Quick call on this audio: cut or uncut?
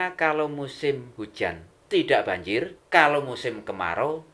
cut